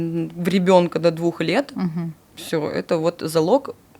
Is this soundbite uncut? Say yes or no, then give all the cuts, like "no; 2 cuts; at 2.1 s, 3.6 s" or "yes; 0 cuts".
yes; 0 cuts